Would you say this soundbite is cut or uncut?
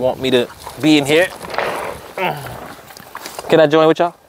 uncut